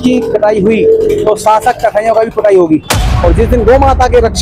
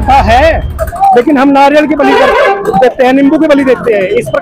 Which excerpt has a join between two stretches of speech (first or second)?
first